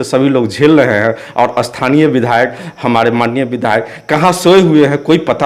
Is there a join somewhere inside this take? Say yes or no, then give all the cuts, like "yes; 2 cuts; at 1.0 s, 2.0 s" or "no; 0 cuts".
no; 0 cuts